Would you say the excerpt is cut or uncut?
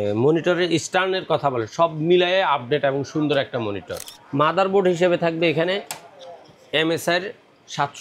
cut